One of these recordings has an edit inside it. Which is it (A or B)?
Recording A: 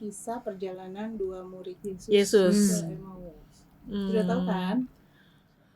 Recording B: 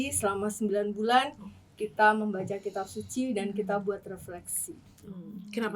A